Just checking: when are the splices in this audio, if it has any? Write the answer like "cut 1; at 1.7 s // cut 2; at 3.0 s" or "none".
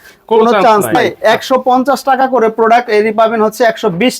cut 1; at 1.1 s